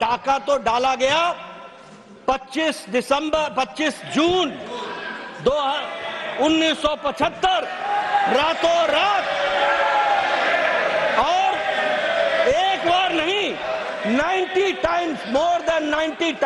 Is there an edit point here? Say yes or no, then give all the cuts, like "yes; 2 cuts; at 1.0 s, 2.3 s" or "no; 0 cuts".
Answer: no; 0 cuts